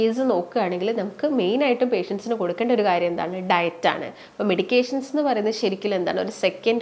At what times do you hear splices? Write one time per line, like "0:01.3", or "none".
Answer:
none